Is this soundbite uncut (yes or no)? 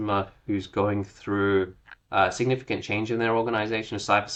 yes